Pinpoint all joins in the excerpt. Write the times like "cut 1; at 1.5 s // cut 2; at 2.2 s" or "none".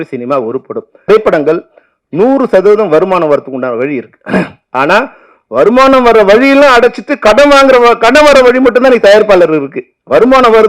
cut 1; at 1.1 s